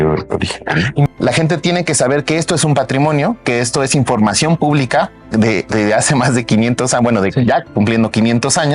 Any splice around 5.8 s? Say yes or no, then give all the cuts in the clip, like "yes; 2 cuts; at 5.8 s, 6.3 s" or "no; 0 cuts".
no; 1 cut; at 1.1 s